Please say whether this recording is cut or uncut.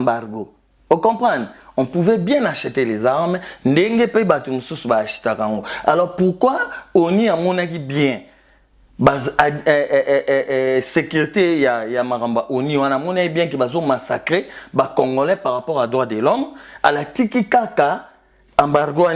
uncut